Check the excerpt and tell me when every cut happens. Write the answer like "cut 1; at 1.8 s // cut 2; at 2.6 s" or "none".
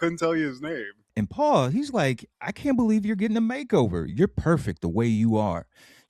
cut 1; at 1.0 s